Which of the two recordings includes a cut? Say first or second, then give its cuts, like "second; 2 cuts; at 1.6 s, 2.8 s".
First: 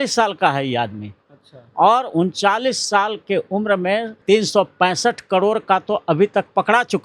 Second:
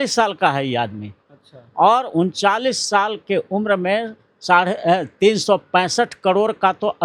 first; 1 cut; at 4.2 s